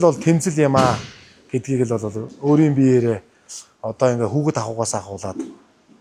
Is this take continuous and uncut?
yes; 0 cuts

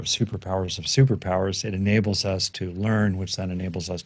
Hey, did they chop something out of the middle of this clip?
no; 0 cuts

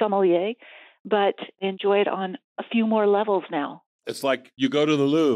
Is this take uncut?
no; 2 cuts; at 1.6 s, 4.1 s

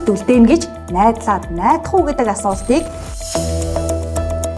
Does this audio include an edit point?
yes; 1 cut; at 3.0 s

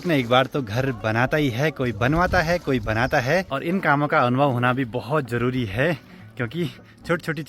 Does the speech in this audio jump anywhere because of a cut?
no; 0 cuts

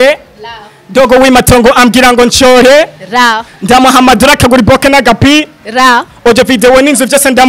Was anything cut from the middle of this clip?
no; 0 cuts

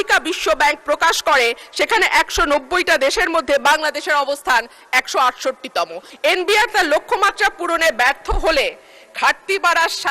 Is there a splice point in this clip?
yes; 1 cut; at 6.0 s

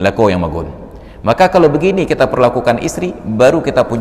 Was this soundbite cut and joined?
no; 0 cuts

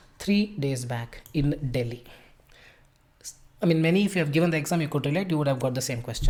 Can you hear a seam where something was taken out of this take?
no; 0 cuts

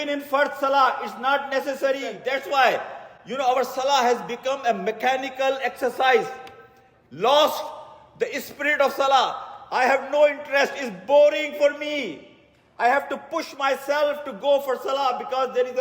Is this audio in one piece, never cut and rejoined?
no; 1 cut; at 2.2 s

